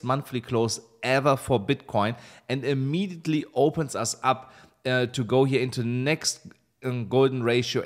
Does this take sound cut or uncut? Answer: uncut